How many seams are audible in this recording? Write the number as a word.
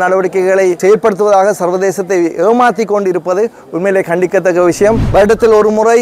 two